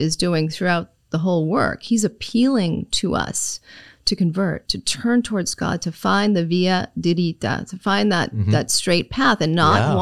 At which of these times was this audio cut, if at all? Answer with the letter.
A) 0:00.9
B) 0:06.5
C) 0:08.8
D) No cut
D